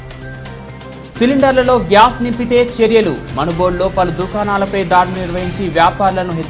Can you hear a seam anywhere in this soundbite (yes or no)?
yes